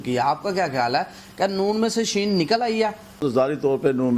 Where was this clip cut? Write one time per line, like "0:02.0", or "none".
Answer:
0:03.2